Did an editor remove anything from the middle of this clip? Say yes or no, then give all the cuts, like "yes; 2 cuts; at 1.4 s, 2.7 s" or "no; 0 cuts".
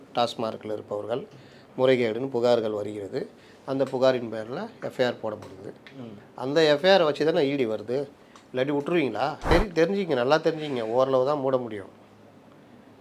yes; 1 cut; at 9.5 s